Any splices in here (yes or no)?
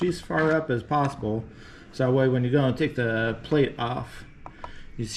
no